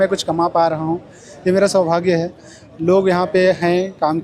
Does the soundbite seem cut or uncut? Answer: uncut